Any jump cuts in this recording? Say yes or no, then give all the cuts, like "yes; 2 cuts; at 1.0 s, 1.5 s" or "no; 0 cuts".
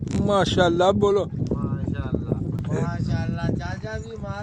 yes; 1 cut; at 2.6 s